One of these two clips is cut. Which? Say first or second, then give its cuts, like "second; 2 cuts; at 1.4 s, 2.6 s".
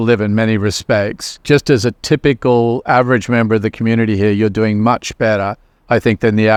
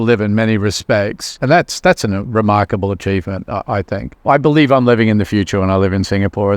second; 1 cut; at 1.3 s